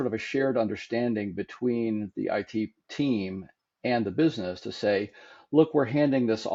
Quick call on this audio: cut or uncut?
uncut